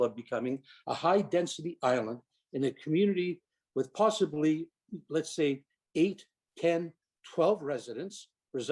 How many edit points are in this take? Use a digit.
0